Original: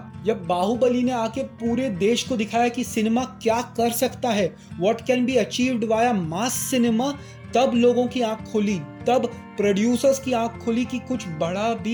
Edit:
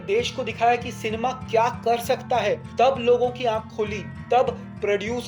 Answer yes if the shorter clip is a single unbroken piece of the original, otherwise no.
no